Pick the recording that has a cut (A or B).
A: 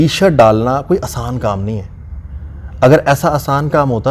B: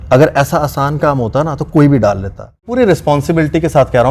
B